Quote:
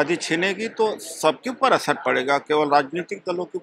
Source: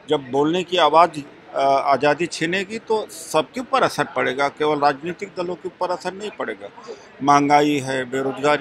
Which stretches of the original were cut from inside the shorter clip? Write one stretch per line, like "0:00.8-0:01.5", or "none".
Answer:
none